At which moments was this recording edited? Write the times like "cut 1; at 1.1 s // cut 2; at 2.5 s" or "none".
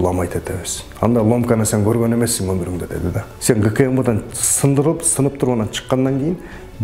cut 1; at 3.3 s